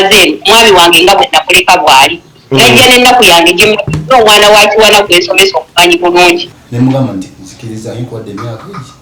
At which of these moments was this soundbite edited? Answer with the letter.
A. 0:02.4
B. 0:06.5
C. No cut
B